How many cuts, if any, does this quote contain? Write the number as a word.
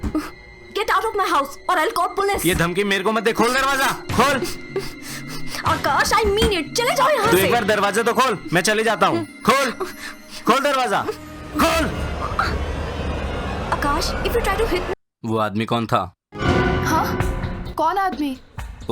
one